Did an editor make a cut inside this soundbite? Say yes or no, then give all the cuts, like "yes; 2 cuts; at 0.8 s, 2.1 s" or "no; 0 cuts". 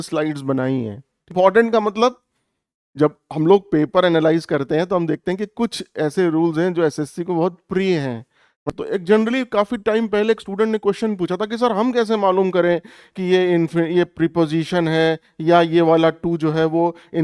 yes; 2 cuts; at 1.3 s, 8.7 s